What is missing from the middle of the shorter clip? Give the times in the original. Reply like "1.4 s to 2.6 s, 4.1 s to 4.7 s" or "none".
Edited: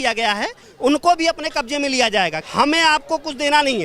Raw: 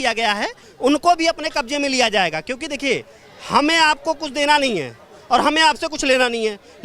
2.4 s to 3.4 s